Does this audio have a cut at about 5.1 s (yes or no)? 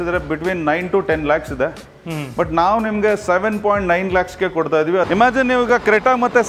yes